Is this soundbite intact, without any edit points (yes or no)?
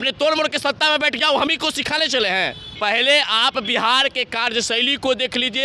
no